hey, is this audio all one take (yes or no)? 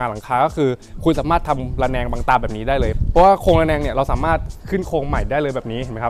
yes